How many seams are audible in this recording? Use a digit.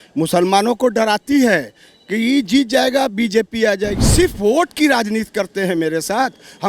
1